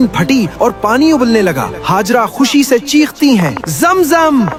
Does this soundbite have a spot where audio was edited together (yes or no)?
no